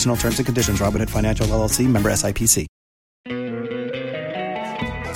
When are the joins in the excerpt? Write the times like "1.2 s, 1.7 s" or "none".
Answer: 3.2 s